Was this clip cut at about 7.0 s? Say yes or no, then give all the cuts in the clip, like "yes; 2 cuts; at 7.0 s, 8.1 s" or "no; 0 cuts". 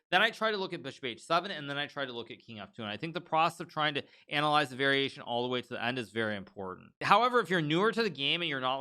yes; 1 cut; at 7.0 s